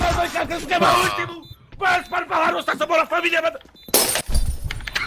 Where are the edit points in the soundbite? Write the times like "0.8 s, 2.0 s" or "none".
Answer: none